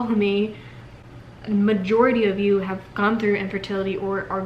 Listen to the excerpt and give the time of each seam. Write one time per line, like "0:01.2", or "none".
none

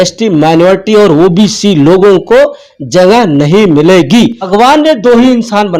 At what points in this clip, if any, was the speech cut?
0:04.5

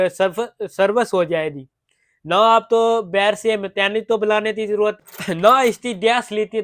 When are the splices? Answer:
0:05.0

